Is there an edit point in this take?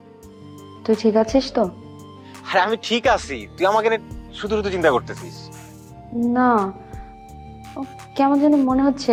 no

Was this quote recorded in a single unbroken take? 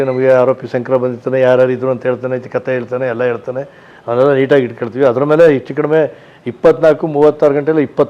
yes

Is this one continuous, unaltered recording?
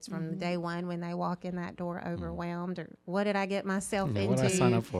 yes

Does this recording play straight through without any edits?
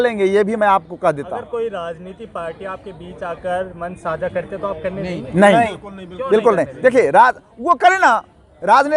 yes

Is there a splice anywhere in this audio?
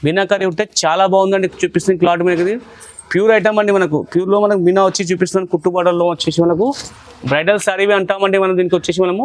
no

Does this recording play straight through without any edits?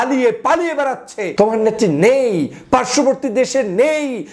no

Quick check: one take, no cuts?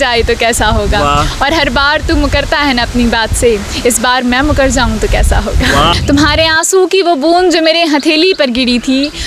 no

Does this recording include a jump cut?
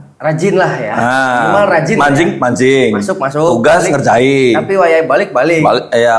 no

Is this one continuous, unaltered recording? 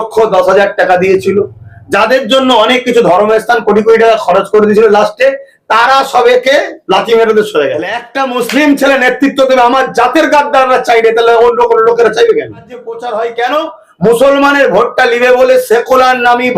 no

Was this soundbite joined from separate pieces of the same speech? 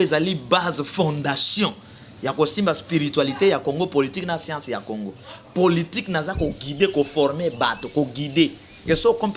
no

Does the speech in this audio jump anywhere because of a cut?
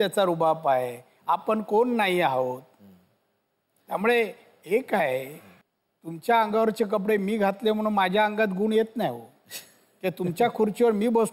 no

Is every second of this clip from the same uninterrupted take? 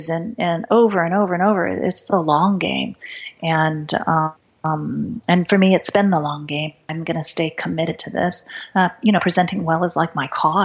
no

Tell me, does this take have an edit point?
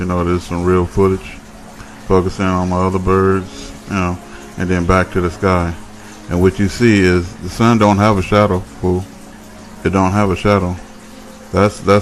yes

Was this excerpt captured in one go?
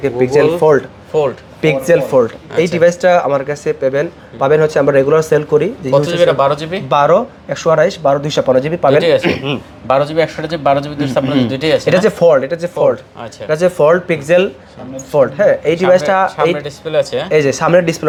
yes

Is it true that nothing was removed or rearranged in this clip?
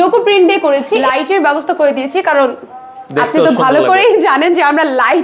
no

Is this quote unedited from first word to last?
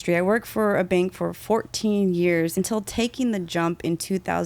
no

